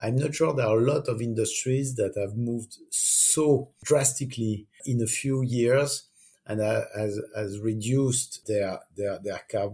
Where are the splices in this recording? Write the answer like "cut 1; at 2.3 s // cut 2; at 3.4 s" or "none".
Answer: cut 1; at 3.8 s // cut 2; at 4.8 s // cut 3; at 8.4 s